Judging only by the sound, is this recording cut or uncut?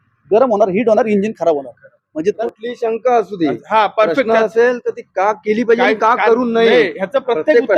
cut